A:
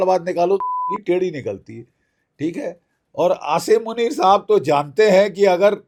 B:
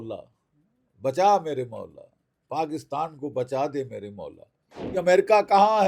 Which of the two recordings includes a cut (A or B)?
B